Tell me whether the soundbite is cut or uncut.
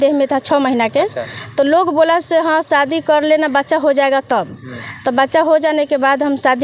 uncut